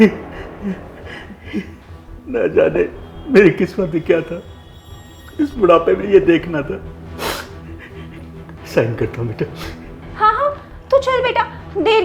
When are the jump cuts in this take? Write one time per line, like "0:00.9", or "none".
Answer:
none